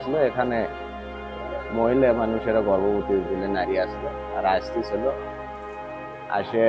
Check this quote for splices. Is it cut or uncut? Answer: uncut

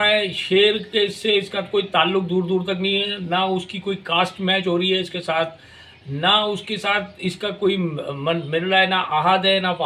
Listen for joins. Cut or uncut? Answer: uncut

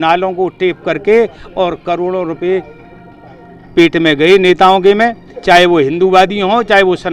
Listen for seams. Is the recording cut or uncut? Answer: uncut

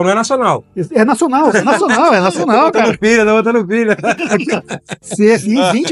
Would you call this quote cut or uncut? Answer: uncut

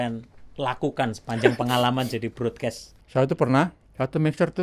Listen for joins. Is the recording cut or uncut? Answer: cut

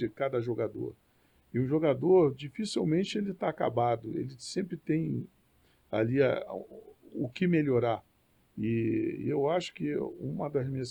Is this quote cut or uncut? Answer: uncut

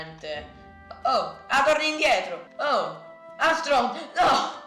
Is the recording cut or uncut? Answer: cut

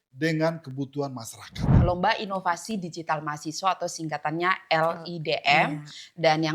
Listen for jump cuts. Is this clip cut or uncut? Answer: cut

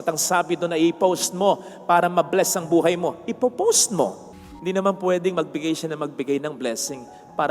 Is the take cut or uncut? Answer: cut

